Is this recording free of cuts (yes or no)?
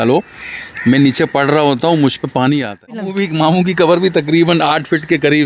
no